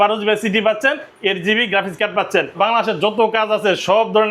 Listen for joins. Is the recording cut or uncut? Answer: cut